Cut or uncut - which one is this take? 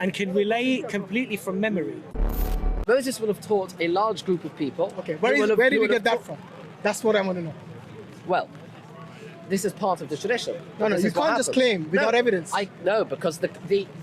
cut